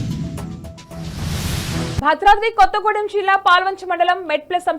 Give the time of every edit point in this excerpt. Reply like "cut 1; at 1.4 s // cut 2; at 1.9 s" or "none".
cut 1; at 2.0 s